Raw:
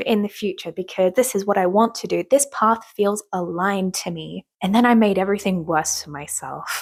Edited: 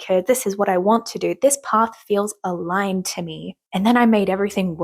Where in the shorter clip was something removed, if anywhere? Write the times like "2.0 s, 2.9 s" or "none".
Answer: none

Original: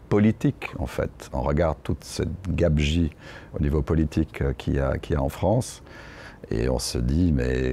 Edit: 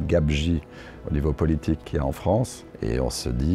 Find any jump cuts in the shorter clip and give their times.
1.8 s, 2.6 s

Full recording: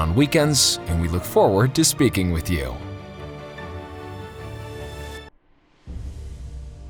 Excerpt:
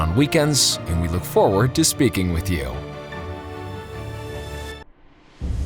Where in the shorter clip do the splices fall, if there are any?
2.7 s

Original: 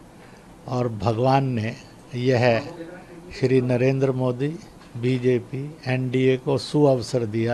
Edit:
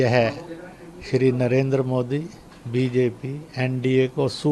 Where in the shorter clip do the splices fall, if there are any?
none

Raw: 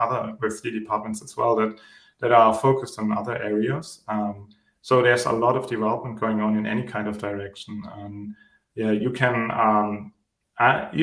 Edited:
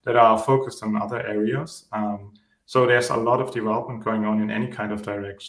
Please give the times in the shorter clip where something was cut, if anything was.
none

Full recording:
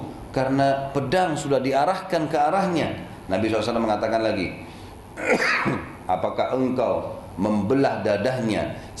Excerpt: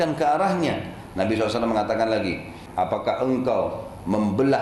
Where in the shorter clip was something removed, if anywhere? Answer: 2.6 s

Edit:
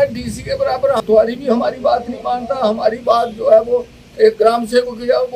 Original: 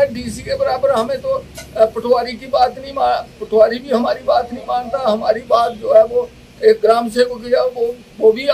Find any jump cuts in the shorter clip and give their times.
1.0 s

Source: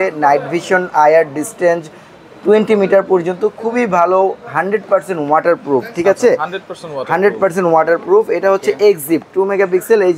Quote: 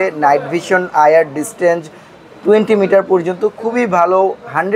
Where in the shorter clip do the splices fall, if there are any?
none

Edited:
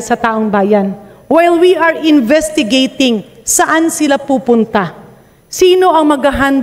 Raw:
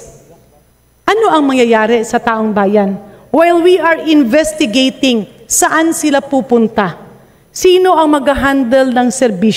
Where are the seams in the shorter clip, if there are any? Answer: none

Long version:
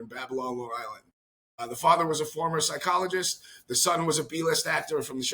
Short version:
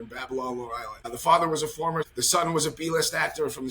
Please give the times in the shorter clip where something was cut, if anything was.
0.9 s, 2.1 s

